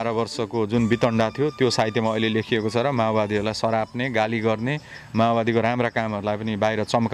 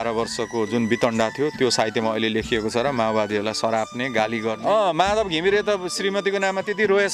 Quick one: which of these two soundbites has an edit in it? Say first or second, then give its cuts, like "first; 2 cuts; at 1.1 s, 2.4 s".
second; 1 cut; at 4.5 s